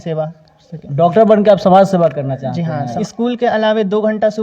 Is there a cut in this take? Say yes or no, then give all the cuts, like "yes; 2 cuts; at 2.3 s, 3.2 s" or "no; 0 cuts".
yes; 1 cut; at 3.0 s